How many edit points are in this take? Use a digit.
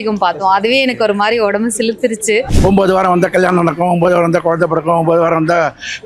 1